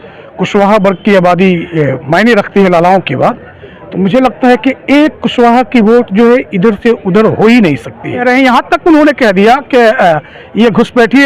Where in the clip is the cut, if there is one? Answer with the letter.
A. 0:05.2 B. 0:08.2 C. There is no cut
B